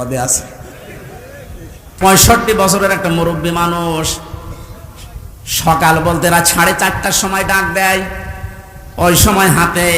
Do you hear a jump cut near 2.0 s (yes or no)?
yes